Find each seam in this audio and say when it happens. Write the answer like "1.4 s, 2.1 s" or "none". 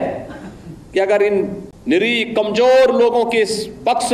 1.7 s